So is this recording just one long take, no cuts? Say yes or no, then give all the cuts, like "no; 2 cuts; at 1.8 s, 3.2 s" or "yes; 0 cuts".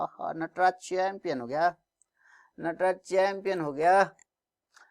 yes; 0 cuts